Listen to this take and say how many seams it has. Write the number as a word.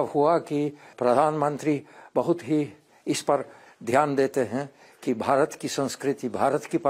two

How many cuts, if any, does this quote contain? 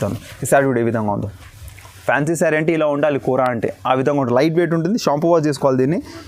zero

